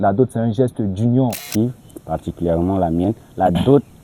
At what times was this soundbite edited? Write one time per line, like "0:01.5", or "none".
0:01.4